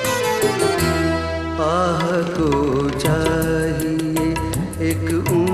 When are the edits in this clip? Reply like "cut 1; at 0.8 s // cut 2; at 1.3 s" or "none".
cut 1; at 2.3 s